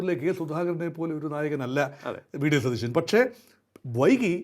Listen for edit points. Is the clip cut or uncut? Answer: uncut